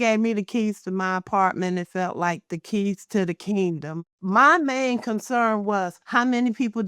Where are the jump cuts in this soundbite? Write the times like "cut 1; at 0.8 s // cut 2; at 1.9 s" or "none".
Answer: cut 1; at 4.1 s // cut 2; at 6.0 s